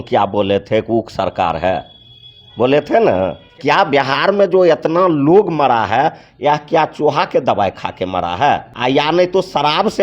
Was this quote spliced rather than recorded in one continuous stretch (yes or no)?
yes